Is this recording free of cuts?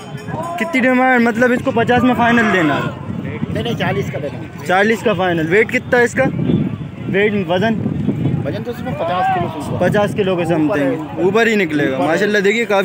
yes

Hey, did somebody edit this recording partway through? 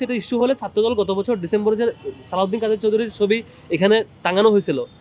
no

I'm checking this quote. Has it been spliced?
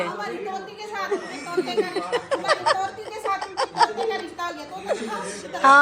no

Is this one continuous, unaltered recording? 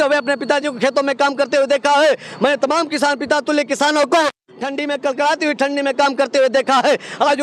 yes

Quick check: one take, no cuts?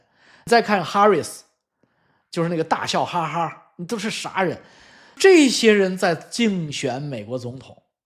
yes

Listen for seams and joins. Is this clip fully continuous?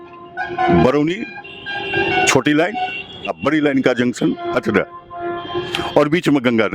yes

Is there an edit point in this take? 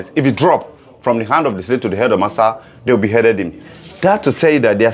yes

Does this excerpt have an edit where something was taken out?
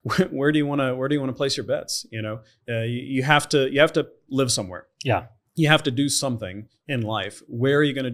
no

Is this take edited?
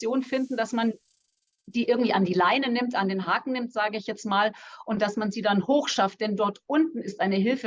no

